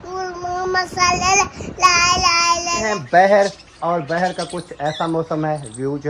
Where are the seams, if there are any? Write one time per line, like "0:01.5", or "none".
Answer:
0:03.0